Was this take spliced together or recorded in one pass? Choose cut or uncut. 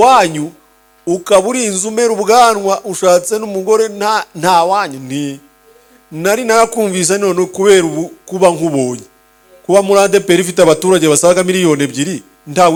uncut